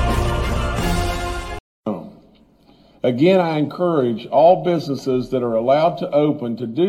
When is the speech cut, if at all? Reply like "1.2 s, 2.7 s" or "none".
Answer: 1.7 s